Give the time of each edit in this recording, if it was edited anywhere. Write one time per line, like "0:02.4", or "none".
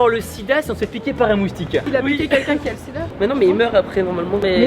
0:01.9